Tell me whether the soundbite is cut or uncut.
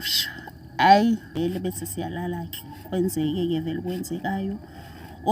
cut